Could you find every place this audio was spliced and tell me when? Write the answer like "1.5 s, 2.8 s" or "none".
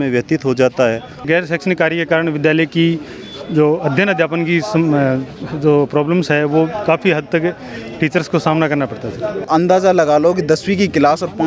1.2 s, 9.4 s

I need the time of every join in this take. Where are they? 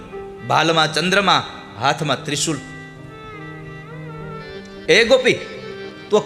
4.4 s

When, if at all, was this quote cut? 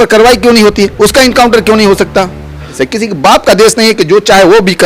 2.8 s

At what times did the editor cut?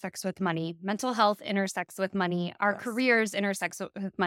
none

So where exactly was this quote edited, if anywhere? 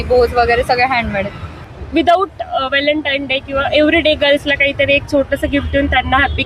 1.6 s

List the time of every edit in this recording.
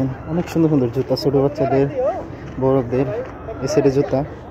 none

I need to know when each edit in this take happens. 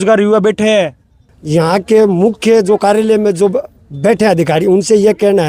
1.2 s

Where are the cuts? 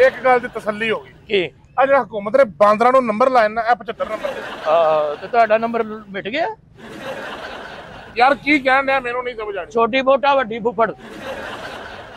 8.0 s

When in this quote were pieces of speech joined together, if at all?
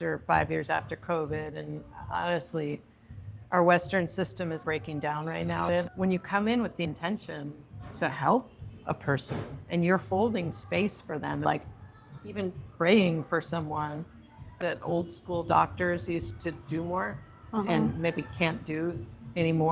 11.4 s, 14.6 s

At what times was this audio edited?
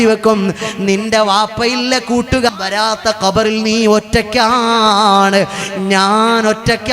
2.5 s

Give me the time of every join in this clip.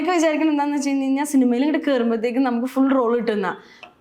none

